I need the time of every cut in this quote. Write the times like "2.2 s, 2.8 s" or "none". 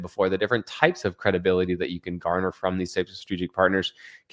none